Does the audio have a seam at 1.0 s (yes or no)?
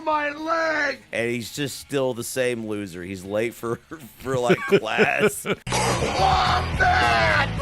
yes